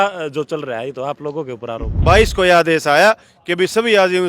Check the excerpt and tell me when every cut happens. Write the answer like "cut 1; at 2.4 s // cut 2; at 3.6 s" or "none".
cut 1; at 1.9 s